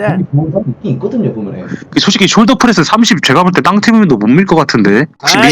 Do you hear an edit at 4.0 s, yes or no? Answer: no